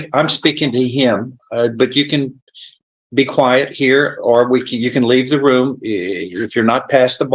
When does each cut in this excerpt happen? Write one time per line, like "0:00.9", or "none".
none